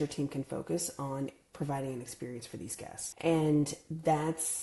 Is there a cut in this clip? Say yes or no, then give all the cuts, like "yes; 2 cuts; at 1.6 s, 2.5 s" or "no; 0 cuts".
yes; 1 cut; at 3.0 s